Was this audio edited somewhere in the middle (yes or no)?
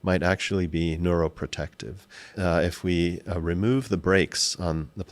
yes